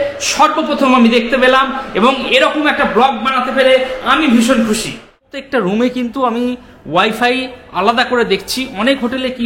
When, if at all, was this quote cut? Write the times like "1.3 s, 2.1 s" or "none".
5.3 s